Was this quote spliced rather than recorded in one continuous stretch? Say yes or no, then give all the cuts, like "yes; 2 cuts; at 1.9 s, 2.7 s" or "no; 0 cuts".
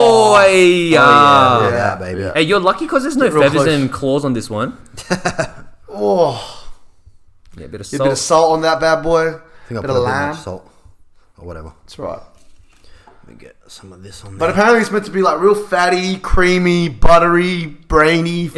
no; 0 cuts